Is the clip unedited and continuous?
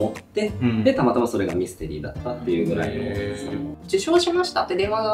no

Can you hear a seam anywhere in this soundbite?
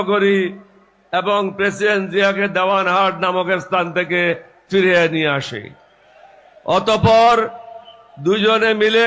no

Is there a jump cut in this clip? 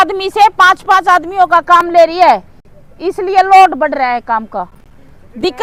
no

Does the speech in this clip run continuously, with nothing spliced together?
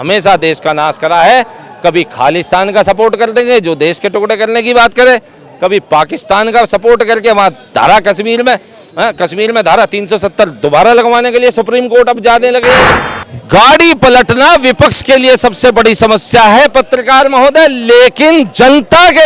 no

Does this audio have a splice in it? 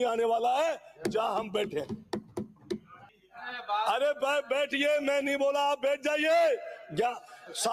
no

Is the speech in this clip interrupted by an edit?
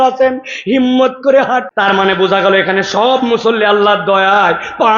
yes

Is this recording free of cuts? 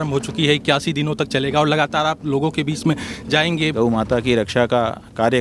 no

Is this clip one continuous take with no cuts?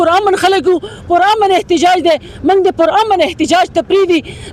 yes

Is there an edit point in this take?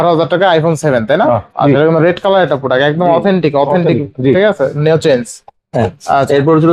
no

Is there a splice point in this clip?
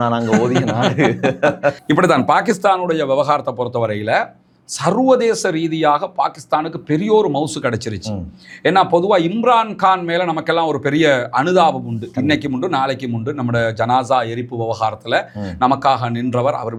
no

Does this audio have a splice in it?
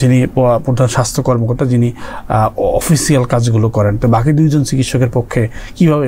no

